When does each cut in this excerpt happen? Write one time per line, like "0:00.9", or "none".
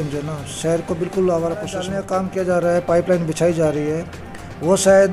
0:02.0